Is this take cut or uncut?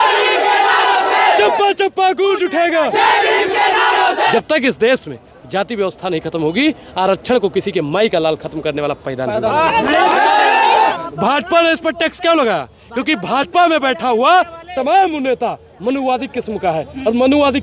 cut